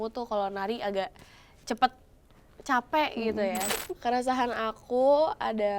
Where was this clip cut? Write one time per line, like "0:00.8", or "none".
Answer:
0:03.7